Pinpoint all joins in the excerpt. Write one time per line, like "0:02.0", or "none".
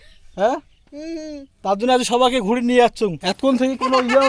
0:03.3

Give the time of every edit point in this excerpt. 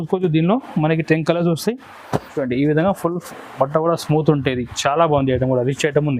0:02.3

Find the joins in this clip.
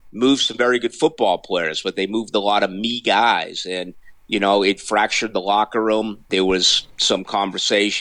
0:06.2

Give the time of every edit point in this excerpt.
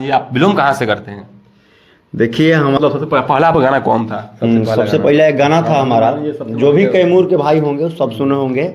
0:02.8

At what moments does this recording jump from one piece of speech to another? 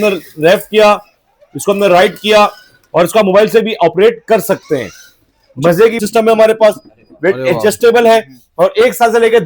0:06.0

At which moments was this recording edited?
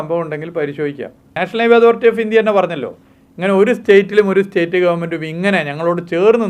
0:01.4

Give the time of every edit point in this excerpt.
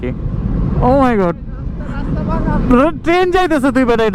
none

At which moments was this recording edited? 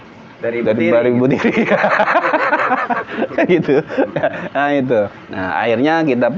0:05.2

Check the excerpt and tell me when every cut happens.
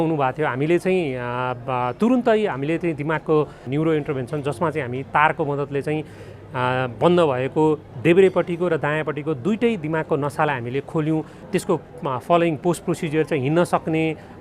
0:03.6

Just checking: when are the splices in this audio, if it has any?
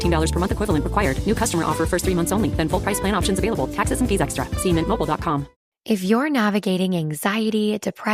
0:05.7

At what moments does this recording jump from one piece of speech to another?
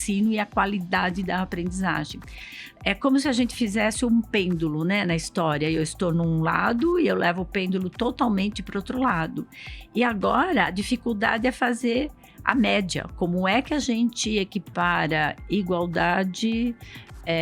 none

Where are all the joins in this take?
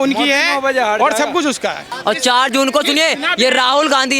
0:01.9

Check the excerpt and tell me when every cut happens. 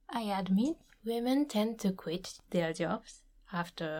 0:00.9
0:02.3

